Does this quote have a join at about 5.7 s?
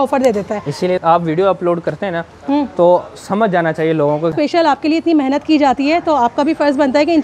no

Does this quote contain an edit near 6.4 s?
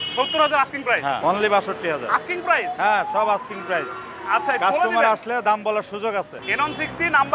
yes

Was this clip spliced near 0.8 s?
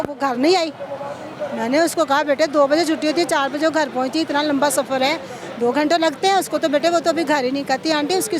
no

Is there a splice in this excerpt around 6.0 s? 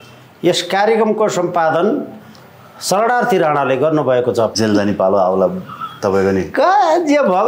no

